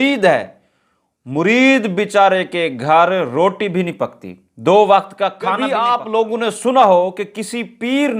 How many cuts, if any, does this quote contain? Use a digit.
1